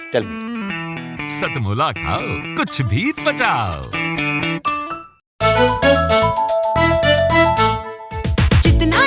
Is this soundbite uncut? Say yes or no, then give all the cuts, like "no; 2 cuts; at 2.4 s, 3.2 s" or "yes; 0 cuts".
no; 1 cut; at 5.2 s